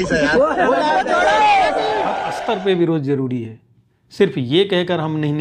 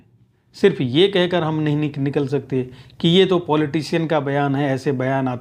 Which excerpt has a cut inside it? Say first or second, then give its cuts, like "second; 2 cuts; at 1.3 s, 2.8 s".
first; 1 cut; at 2.2 s